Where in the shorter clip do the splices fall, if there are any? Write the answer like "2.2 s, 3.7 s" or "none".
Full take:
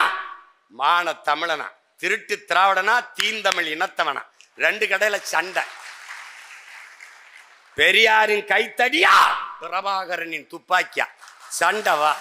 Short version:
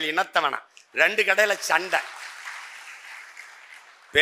none

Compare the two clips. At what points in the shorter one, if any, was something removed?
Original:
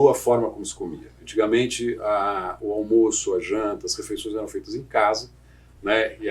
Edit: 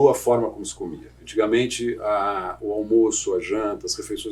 none

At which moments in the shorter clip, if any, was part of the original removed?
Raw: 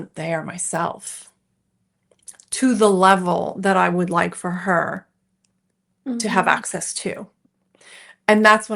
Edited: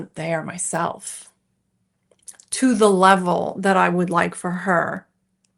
none

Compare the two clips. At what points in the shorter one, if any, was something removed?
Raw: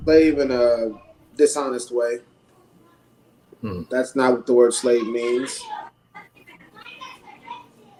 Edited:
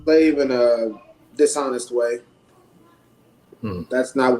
none

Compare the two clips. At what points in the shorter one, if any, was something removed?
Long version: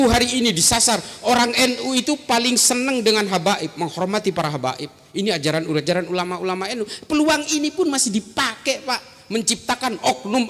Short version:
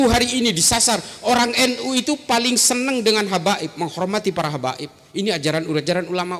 none

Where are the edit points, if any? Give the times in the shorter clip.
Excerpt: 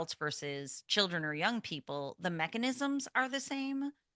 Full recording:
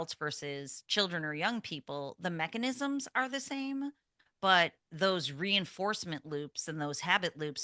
none

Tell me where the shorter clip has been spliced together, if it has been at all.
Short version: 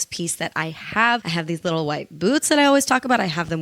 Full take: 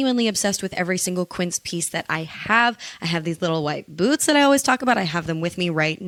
1.3 s

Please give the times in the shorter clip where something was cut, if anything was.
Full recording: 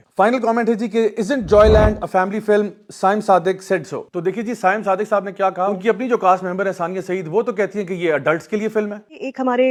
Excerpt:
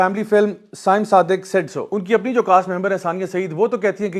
2.0 s

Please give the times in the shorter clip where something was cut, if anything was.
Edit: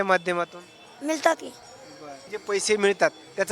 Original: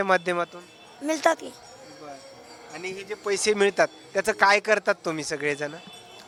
2.3 s

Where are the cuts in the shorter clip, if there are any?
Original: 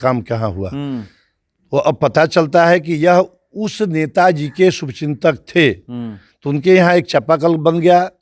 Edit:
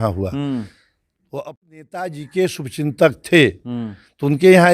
1.2 s

